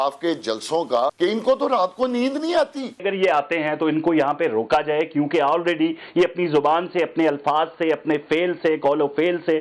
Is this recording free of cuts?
no; 2 cuts; at 1.1 s, 3.0 s

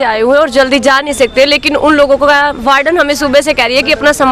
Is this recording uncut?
yes; 0 cuts

